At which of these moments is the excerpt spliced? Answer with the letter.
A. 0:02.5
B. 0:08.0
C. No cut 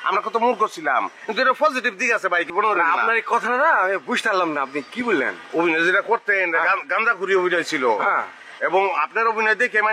A